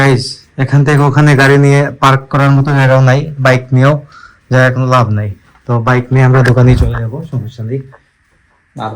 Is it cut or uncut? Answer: uncut